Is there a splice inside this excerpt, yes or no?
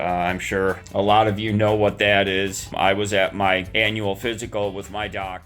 yes